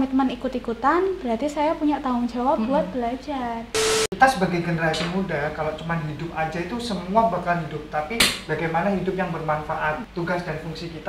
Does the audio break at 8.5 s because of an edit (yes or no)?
no